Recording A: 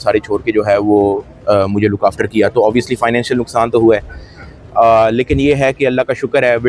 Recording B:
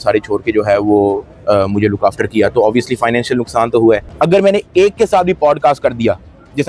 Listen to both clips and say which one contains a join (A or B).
B